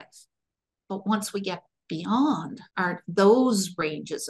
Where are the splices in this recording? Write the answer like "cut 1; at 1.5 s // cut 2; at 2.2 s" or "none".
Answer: cut 1; at 2.6 s